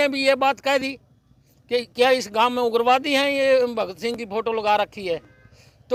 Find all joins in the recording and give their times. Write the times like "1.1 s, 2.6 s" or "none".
none